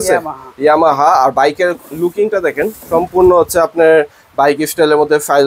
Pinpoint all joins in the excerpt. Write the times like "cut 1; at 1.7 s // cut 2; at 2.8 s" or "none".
none